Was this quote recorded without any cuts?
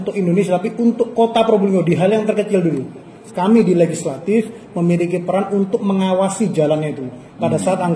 no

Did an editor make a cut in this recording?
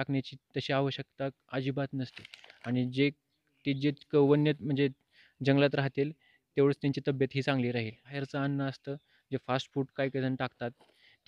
yes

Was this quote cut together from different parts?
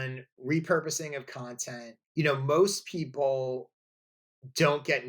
yes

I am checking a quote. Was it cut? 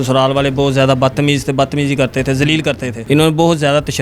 yes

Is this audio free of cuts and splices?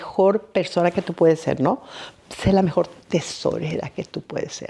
yes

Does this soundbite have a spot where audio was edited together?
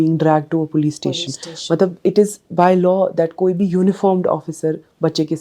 no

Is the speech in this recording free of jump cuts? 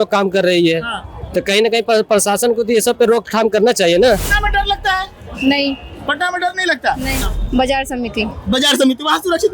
no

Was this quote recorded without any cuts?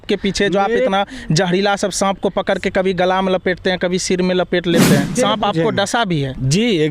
no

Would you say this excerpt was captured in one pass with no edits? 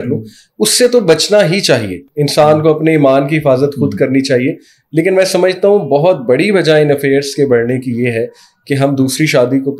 yes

